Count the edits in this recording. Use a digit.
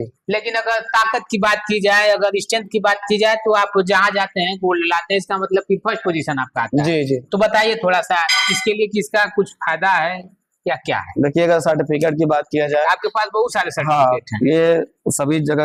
0